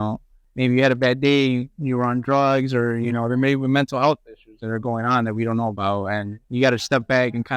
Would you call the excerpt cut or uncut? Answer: cut